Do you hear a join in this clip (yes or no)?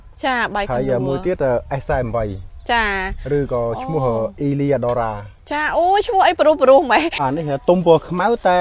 yes